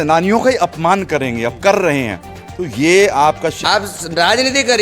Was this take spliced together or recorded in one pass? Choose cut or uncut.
cut